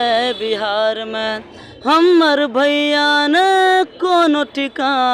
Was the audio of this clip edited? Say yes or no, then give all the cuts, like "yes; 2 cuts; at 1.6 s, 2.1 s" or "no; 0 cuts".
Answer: no; 0 cuts